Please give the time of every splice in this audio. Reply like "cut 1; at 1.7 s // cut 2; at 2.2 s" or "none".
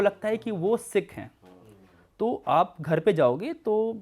none